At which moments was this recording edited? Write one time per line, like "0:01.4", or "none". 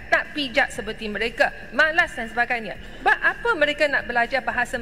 none